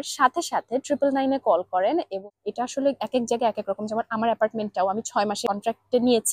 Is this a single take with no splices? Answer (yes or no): no